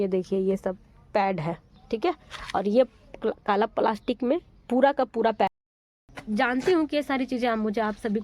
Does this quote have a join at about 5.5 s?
yes; 1 cut; at 5.5 s

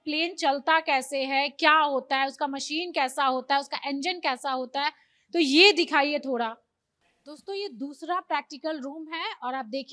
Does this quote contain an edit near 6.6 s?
no; 0 cuts

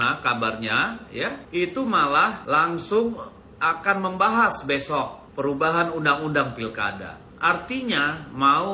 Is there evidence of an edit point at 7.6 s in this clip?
no; 3 cuts; at 1.4 s, 2.4 s, 5.2 s

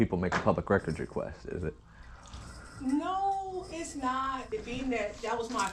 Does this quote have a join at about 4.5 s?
yes; 1 cut; at 4.5 s

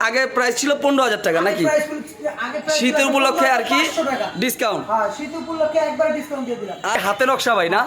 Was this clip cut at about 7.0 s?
yes; 1 cut; at 7.0 s

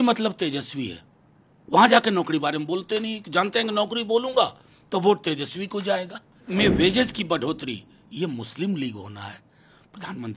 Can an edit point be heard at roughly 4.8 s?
no; 1 cut; at 6.4 s

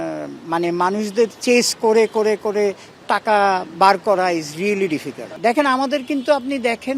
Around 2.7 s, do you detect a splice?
no; 1 cut; at 5.3 s

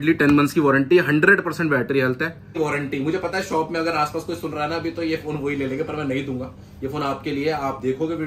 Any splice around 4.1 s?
no; 1 cut; at 2.6 s

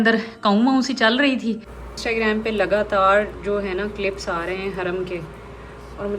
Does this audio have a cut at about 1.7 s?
yes; 1 cut; at 1.7 s

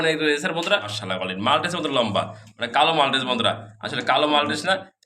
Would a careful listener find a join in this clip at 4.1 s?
no; 1 cut; at 1.0 s

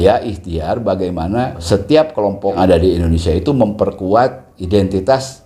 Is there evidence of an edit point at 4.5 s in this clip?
no; 2 cuts; at 1.6 s, 2.6 s

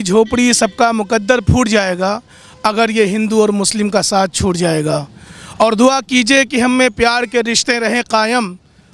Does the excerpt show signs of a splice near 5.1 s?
no; 0 cuts

